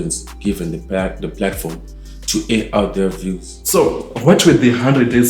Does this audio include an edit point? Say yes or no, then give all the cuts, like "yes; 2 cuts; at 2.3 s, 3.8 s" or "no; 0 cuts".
yes; 1 cut; at 3.5 s